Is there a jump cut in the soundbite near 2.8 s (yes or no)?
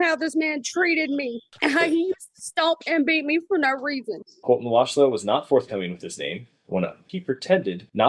no